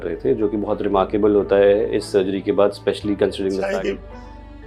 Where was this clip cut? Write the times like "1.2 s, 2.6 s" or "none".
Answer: 3.7 s

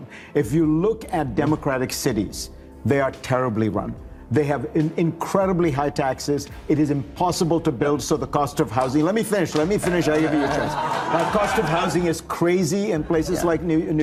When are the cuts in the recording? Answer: none

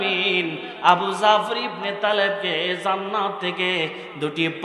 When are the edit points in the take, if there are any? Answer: none

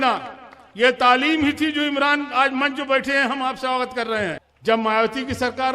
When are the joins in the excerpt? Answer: 4.5 s

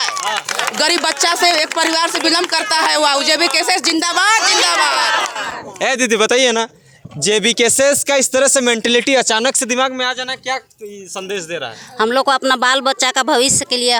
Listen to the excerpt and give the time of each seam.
none

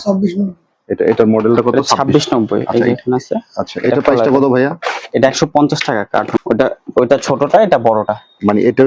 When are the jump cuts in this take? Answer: 6.3 s

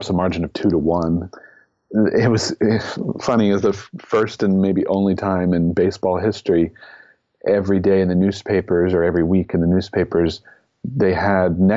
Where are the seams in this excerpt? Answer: 1.4 s

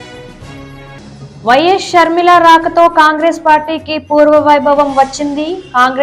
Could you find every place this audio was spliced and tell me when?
1.3 s

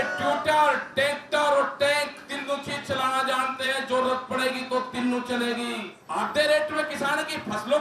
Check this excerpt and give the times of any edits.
5.9 s

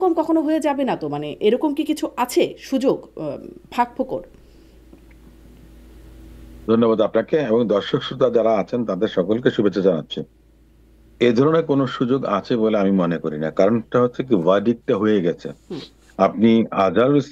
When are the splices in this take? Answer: none

